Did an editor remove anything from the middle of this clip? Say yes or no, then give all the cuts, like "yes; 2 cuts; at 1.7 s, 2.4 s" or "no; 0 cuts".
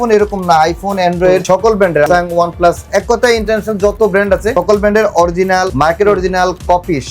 yes; 3 cuts; at 1.9 s, 4.5 s, 5.7 s